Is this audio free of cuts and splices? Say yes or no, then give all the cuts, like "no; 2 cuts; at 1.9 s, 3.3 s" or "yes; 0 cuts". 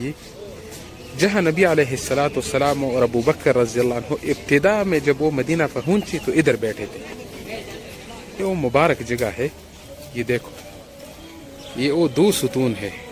no; 1 cut; at 8.4 s